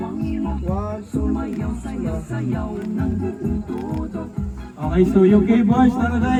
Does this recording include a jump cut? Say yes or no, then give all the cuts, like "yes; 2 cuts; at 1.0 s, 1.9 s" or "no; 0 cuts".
no; 0 cuts